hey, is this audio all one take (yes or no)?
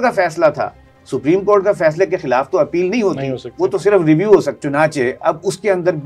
no